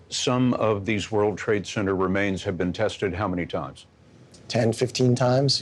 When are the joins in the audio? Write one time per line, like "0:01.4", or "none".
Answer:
none

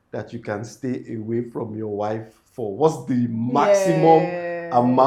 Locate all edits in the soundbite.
none

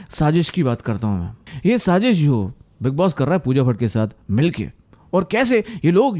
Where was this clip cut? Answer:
none

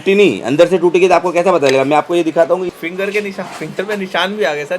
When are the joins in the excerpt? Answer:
0:02.7

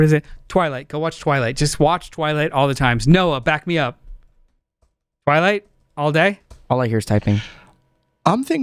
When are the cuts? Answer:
none

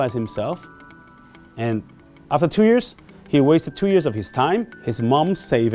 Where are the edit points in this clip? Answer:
0:04.8

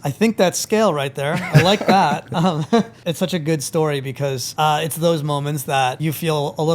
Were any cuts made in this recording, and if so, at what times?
0:03.0
0:04.4
0:06.0

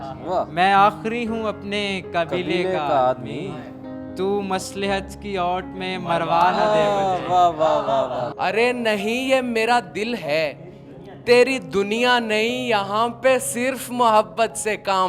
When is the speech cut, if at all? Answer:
0:08.3

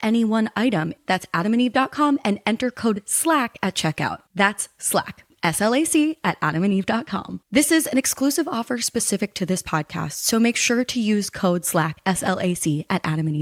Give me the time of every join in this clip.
none

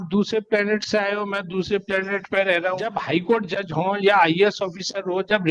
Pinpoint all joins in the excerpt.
0:03.0

